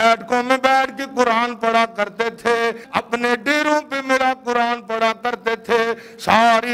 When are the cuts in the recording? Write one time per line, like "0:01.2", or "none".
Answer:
0:02.8